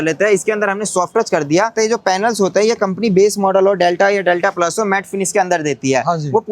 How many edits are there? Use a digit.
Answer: 1